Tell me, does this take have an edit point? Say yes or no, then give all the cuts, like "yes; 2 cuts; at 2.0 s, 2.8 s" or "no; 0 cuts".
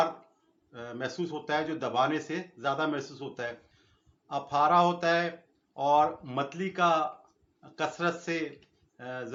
no; 0 cuts